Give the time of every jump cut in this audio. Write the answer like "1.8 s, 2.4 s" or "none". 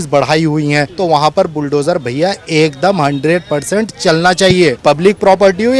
0.9 s, 4.8 s